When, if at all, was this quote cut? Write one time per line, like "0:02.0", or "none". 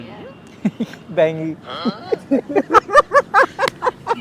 0:02.3

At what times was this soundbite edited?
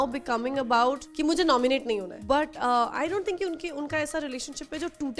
0:01.1
0:02.1

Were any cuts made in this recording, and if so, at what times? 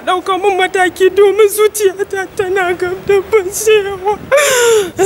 none

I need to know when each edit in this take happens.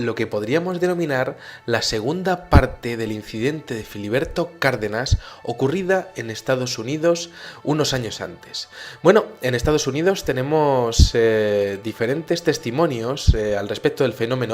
0:03.6

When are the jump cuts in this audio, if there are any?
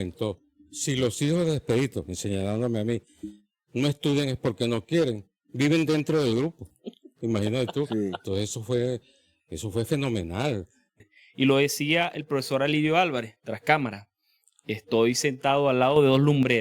0:11.0

